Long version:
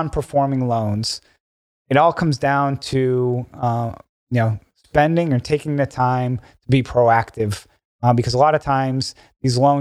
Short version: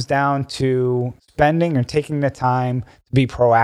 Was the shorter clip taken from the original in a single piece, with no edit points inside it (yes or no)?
no